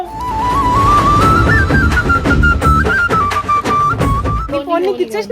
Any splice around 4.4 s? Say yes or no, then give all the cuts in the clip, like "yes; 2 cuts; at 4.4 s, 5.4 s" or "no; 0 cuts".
yes; 1 cut; at 4.4 s